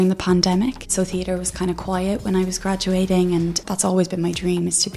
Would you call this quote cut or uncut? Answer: cut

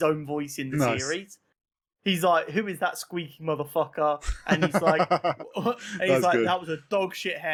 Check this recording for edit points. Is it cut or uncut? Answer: uncut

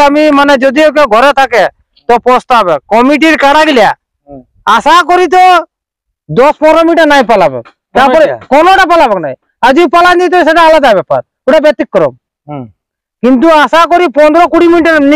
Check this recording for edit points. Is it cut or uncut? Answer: uncut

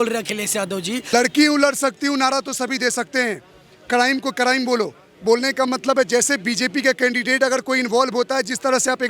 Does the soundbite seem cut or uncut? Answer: cut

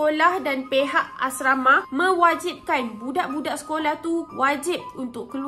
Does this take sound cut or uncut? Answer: uncut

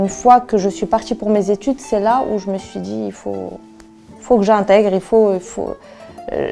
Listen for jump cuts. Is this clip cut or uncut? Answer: uncut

